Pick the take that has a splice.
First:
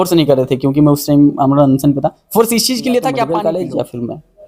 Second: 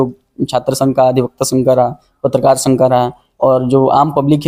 first; 1 cut; at 3.3 s

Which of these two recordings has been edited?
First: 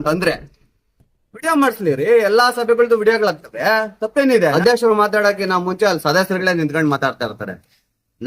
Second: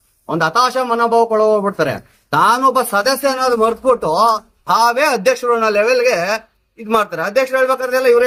first; 1 cut; at 4.5 s

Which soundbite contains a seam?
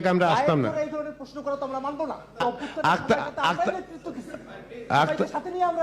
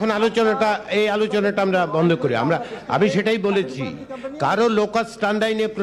first; 1 cut; at 2.4 s

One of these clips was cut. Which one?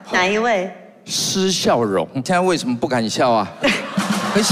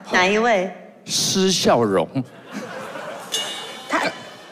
first; 1 cut; at 2.2 s

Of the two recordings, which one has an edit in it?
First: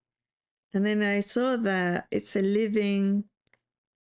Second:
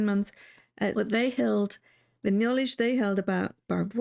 second; 1 cut; at 0.9 s

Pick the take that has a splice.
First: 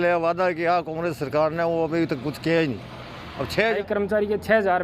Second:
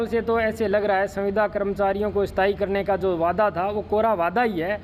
first; 1 cut; at 3.8 s

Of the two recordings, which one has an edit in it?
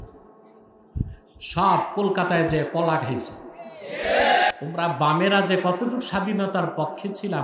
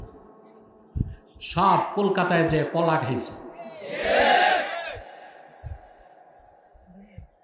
first; 1 cut; at 4.5 s

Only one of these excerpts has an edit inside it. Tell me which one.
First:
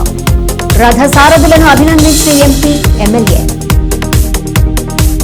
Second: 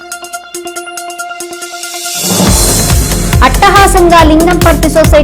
second; 1 cut; at 1.5 s

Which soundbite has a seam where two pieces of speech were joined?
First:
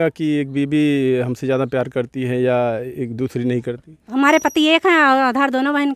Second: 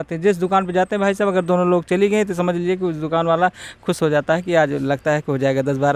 first; 1 cut; at 4.1 s

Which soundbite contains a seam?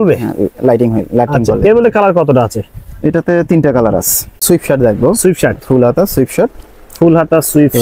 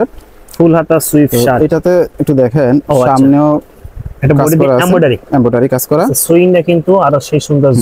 first; 1 cut; at 4.4 s

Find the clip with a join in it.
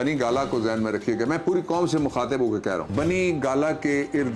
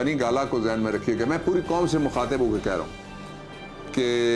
first; 1 cut; at 2.9 s

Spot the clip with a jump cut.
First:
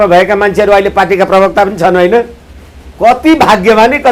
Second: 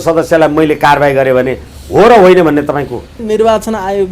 second; 1 cut; at 3.2 s

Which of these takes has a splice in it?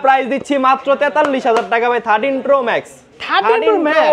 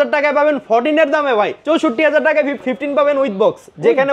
second; 2 cuts; at 1.6 s, 2.6 s

